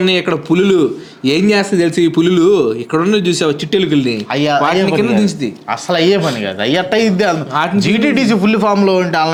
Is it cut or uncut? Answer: uncut